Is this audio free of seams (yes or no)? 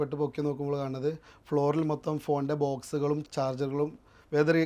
no